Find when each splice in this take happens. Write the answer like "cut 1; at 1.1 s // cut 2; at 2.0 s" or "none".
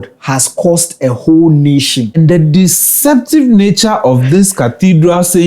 cut 1; at 2.1 s